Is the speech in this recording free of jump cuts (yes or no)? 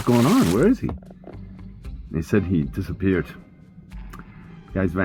yes